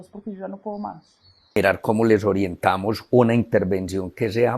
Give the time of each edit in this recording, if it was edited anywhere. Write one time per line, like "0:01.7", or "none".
0:01.5